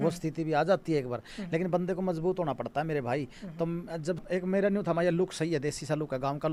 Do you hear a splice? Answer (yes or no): yes